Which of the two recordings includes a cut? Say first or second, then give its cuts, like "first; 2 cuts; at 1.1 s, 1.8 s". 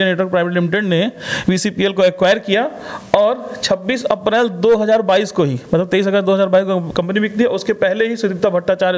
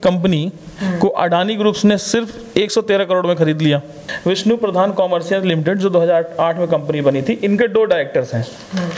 second; 1 cut; at 4.0 s